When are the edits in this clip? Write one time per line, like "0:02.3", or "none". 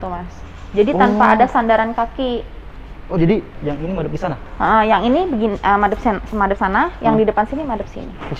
none